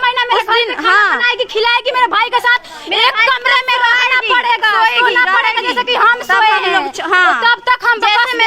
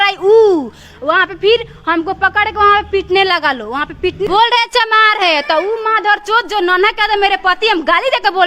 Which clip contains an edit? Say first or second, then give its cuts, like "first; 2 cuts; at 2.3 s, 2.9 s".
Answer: second; 1 cut; at 4.3 s